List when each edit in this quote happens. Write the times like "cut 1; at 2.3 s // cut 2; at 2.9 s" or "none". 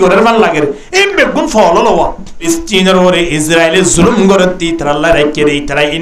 cut 1; at 2.5 s